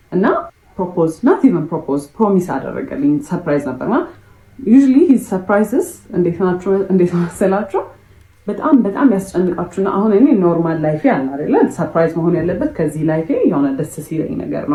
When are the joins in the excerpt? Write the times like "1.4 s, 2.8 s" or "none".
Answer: none

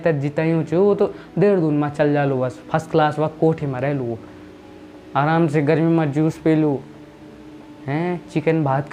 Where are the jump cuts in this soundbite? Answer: none

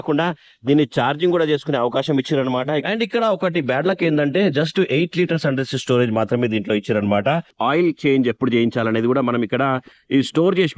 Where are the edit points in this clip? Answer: 2.8 s, 7.5 s

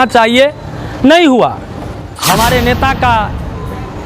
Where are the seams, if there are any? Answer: 2.1 s

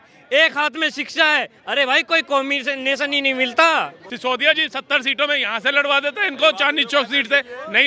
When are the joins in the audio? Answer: 4.0 s

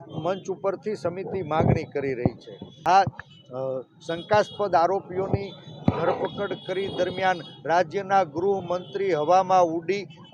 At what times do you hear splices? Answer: 2.7 s

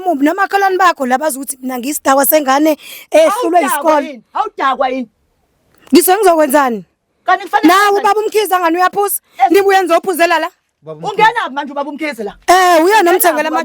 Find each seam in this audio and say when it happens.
none

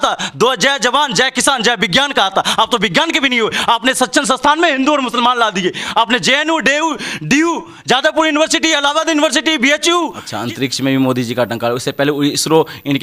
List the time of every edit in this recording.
10.3 s

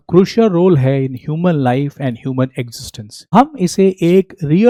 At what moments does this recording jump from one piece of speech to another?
none

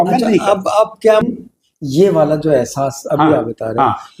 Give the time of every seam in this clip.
1.2 s

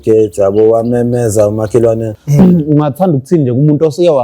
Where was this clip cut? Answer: 2.2 s

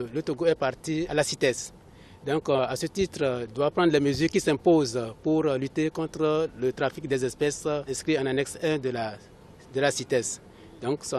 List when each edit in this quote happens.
1.1 s, 7.9 s

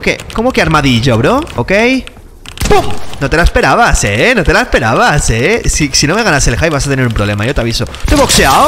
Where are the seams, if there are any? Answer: 1.5 s

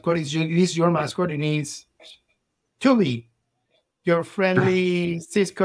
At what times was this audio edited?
none

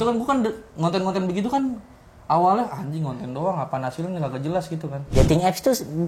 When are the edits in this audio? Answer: 5.0 s

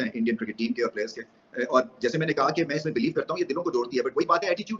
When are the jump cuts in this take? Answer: none

